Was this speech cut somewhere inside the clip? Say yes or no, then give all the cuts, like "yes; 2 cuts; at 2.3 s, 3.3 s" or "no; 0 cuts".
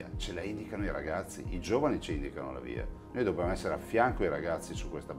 no; 0 cuts